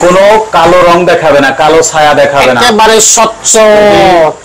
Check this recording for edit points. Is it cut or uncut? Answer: uncut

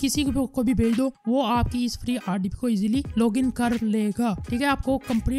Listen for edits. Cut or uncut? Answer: uncut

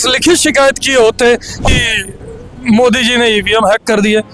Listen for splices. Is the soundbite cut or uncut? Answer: cut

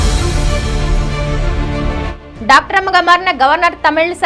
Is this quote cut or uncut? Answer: uncut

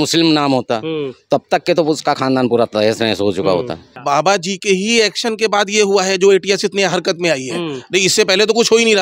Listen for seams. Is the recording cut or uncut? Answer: cut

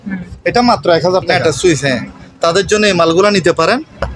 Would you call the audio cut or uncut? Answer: cut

